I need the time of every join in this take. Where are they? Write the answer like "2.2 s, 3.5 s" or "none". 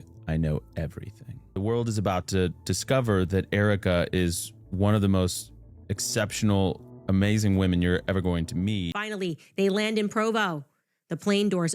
1.5 s, 9.0 s